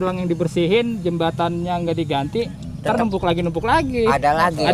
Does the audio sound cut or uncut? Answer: uncut